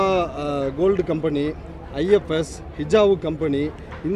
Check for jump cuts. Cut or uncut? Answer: uncut